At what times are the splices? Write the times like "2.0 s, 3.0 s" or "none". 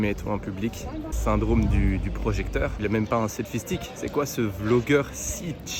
1.1 s, 2.8 s